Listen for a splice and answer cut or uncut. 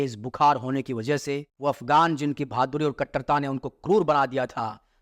cut